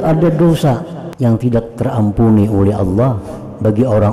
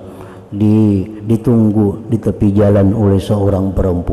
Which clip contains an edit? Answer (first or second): first